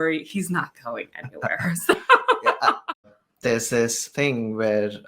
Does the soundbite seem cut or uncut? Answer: cut